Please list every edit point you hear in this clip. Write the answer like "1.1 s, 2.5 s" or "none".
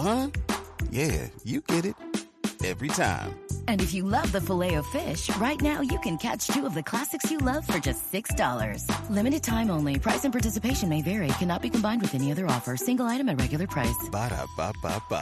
none